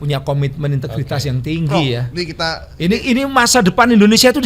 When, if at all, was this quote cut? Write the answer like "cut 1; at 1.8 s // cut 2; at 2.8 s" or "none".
none